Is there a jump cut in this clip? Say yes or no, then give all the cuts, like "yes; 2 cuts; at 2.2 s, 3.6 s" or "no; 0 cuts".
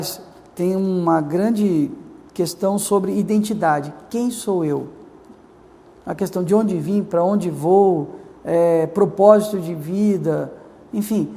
no; 0 cuts